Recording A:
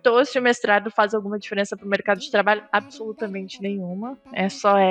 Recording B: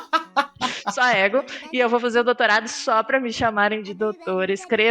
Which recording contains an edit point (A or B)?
B